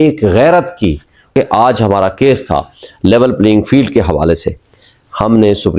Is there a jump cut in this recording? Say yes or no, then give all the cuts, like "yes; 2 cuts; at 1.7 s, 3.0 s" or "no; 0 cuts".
yes; 1 cut; at 1.3 s